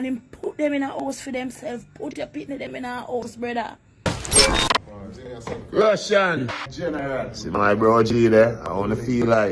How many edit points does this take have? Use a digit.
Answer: 1